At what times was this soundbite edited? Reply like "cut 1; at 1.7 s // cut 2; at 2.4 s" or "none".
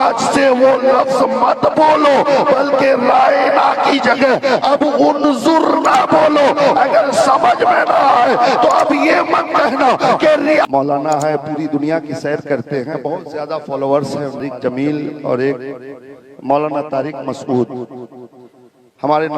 cut 1; at 10.7 s // cut 2; at 14.4 s